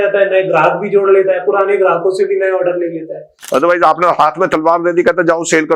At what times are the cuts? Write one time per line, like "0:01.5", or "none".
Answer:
0:03.4